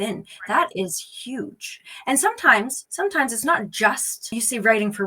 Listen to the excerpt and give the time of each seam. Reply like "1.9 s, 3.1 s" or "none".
2.8 s, 4.3 s